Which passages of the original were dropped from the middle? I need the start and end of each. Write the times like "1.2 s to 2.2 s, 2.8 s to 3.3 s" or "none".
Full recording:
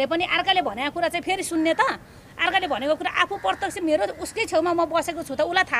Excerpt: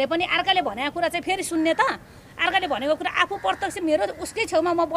none